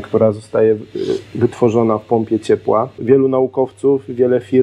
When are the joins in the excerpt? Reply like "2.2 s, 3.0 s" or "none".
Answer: 3.0 s